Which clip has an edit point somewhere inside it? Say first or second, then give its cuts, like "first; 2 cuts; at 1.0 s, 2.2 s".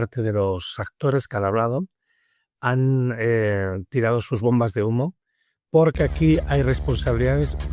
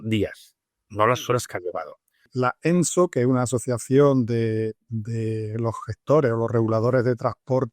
second; 1 cut; at 2.2 s